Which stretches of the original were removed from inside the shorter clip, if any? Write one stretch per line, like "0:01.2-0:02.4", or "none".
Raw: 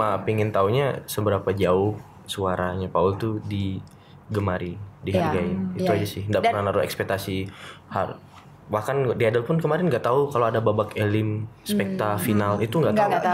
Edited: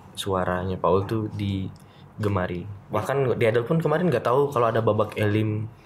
0:04.9-0:08.5